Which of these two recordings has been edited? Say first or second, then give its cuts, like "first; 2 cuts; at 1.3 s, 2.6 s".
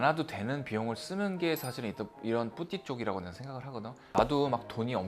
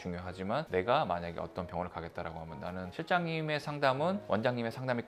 first; 1 cut; at 4.2 s